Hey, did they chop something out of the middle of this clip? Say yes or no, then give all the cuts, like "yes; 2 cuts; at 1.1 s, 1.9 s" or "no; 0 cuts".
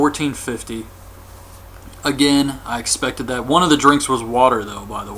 no; 0 cuts